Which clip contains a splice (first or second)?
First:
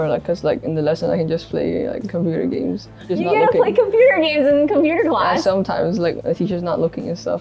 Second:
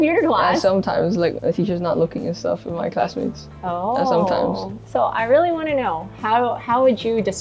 second